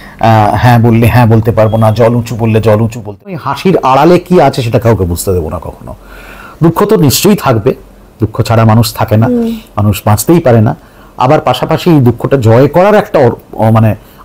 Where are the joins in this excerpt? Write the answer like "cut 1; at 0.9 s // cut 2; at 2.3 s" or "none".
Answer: cut 1; at 3.3 s